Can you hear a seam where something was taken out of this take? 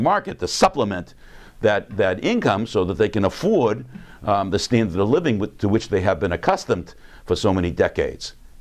yes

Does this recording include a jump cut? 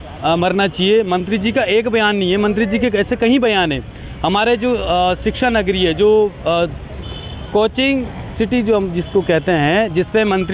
no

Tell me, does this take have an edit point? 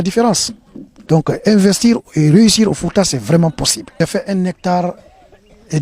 yes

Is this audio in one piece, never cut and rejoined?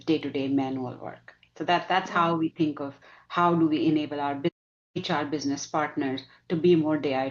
yes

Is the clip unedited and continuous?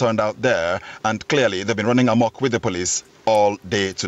yes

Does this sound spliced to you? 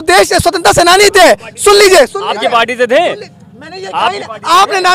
no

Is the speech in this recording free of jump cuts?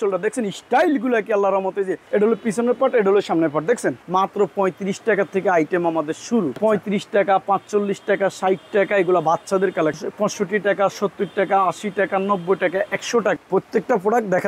no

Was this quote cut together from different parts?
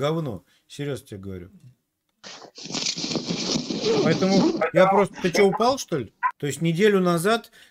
yes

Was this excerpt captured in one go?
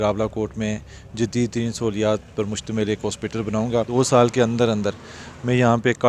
no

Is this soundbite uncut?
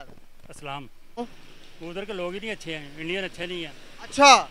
no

